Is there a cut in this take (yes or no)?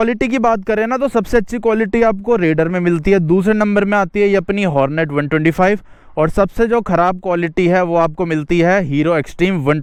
no